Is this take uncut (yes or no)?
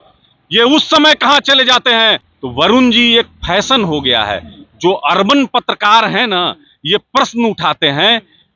no